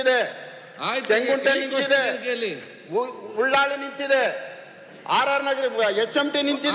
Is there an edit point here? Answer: no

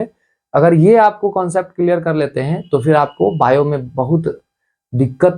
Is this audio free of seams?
yes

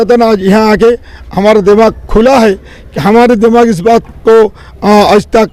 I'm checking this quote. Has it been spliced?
no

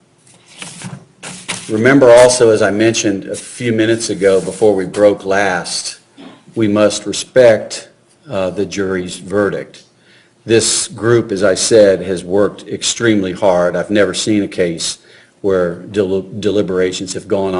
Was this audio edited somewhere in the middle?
yes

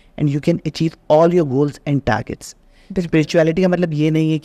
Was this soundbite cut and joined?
no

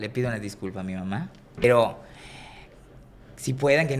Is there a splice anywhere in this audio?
yes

